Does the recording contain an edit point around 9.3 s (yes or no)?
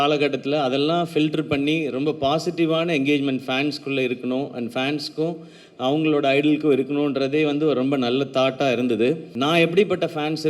yes